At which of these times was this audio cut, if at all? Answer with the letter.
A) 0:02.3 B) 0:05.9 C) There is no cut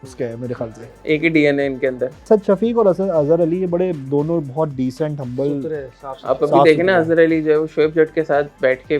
A